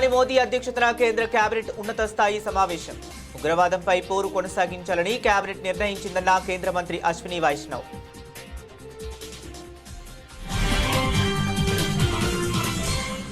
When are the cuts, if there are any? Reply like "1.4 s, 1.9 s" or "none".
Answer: 7.7 s